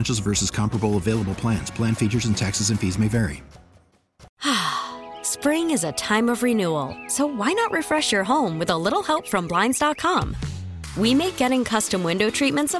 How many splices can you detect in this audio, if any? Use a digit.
1